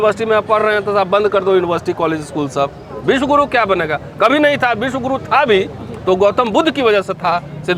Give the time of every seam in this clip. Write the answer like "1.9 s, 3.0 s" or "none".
none